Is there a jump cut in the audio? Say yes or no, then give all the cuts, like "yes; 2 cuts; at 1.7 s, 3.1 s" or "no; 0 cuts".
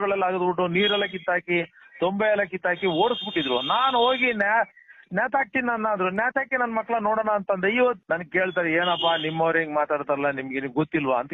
yes; 1 cut; at 8.0 s